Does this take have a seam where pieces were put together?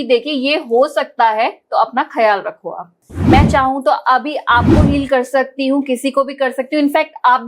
yes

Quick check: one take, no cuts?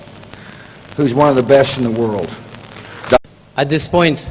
yes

